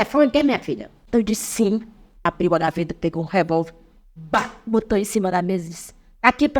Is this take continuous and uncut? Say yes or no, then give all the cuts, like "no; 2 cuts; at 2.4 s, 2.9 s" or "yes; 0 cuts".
no; 2 cuts; at 0.9 s, 2.1 s